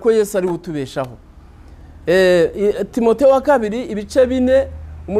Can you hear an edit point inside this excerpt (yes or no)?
no